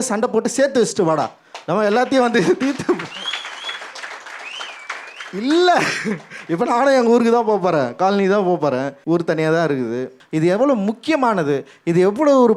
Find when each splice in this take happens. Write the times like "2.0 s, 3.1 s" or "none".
8.9 s, 10.2 s

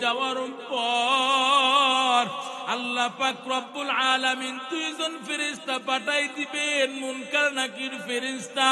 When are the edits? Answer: none

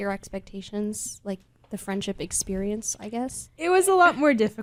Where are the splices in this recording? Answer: none

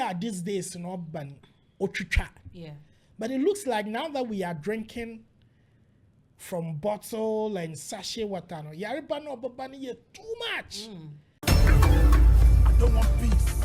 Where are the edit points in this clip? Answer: 11.3 s

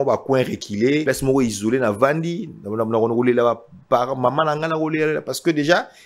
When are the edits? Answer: 1.0 s

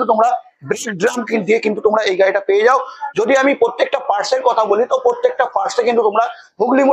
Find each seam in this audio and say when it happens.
none

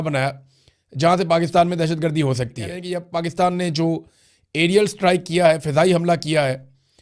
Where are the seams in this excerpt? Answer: 2.9 s

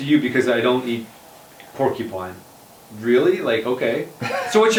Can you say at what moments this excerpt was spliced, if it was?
none

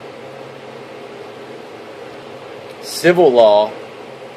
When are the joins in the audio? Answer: none

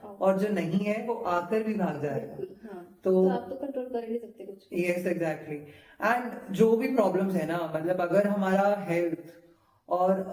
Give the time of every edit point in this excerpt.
none

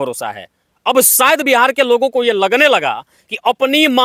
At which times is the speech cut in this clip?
none

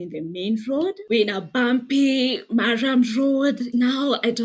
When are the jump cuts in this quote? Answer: 1.0 s, 3.7 s

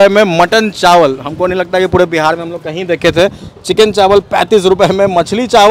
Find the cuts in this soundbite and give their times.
none

